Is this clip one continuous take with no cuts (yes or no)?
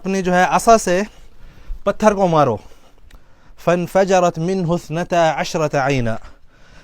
yes